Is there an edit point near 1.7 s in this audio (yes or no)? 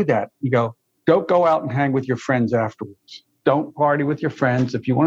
no